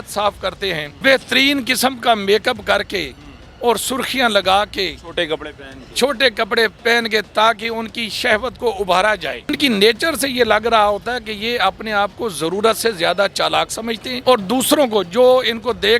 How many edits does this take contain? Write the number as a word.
three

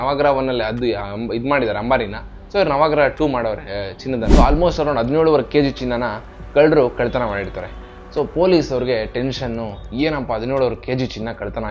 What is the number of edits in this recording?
one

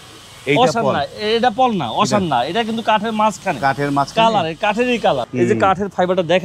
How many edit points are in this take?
one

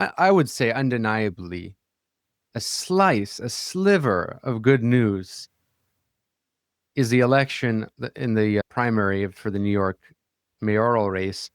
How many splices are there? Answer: one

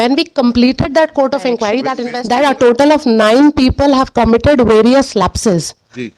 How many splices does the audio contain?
one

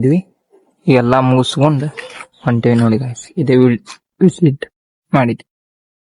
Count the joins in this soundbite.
zero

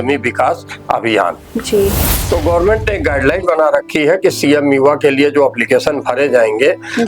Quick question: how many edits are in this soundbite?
one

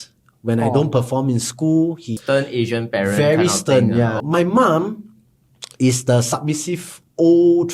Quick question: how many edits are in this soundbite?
two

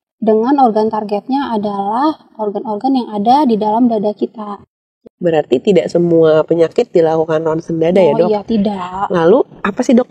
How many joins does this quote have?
one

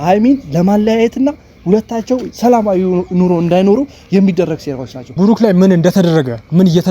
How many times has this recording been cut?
one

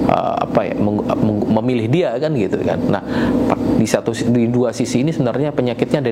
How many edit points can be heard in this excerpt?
zero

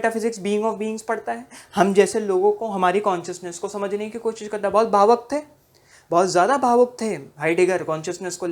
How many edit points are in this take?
zero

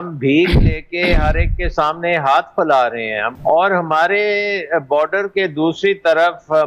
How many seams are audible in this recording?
one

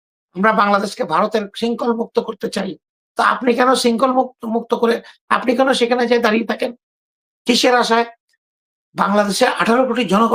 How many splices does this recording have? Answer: zero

